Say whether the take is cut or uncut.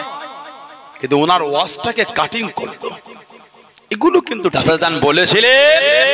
cut